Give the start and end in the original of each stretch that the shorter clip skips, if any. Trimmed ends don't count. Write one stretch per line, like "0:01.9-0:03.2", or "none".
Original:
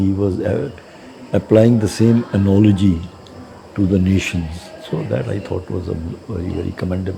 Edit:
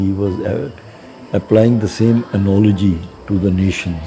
0:03.1-0:03.6